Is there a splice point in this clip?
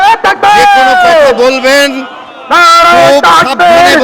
no; 0 cuts

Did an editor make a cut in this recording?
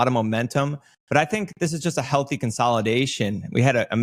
no; 0 cuts

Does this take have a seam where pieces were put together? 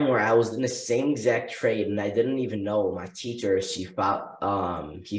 no; 0 cuts

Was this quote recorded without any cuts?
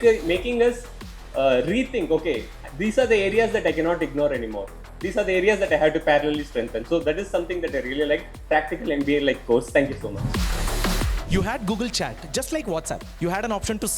no; 1 cut; at 11.3 s

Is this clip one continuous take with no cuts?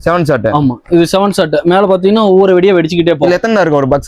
yes; 0 cuts

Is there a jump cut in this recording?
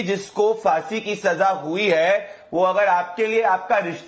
no; 0 cuts

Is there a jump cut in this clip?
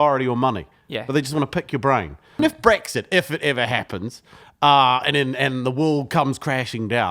yes; 1 cut; at 2.4 s

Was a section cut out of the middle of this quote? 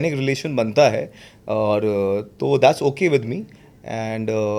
no; 0 cuts

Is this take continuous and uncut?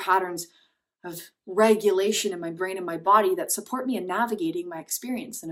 yes; 0 cuts

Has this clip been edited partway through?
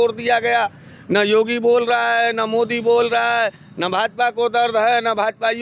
no; 0 cuts

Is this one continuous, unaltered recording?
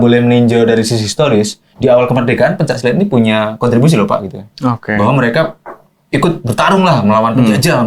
yes; 0 cuts

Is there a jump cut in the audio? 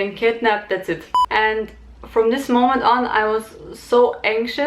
yes; 1 cut; at 1.1 s

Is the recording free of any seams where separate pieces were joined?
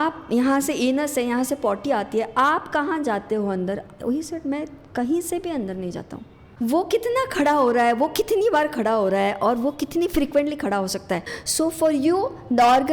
no; 2 cuts; at 6.4 s, 11.3 s

